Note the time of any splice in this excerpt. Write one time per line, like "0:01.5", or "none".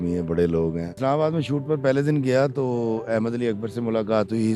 0:01.0